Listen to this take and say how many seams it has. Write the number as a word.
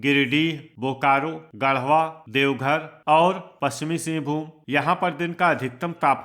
three